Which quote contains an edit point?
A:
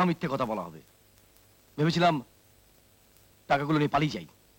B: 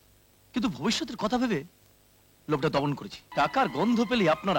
B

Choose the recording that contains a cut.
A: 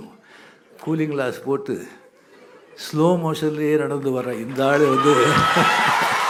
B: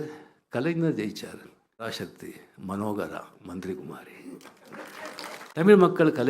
B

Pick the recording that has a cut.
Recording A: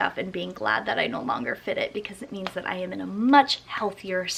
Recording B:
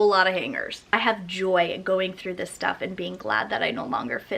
B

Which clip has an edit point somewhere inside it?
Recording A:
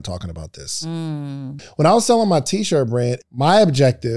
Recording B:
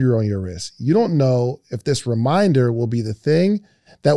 A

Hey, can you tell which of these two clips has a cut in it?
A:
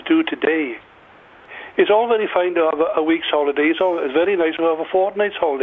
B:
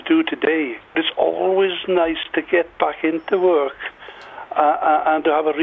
B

